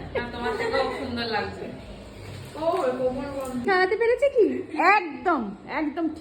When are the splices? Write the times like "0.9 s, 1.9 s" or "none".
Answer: 3.7 s